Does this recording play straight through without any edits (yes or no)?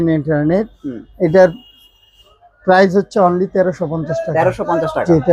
yes